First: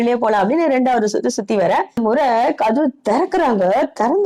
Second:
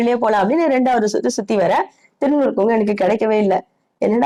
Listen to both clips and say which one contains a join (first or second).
first